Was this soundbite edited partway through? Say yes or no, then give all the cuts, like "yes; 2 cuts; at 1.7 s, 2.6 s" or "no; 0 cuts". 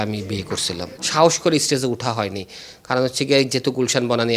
yes; 1 cut; at 1.0 s